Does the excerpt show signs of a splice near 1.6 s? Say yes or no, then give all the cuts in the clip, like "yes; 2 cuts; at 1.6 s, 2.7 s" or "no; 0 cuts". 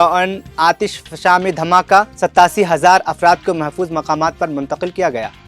no; 0 cuts